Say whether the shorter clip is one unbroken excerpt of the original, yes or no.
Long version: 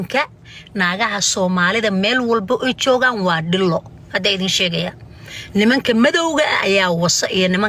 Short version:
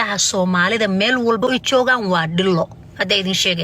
no